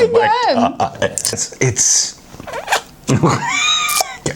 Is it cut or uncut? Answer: cut